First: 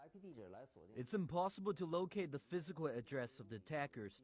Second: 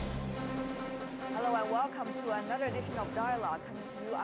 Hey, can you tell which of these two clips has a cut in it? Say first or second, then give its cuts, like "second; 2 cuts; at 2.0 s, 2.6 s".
first; 1 cut; at 2.1 s